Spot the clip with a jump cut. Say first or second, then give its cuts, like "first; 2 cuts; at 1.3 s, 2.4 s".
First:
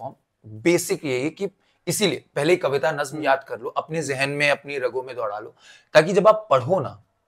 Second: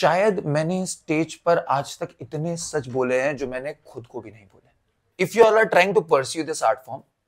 second; 1 cut; at 5.1 s